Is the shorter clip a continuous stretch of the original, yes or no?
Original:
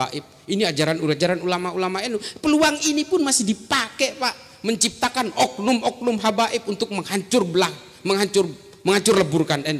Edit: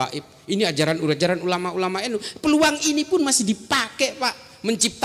yes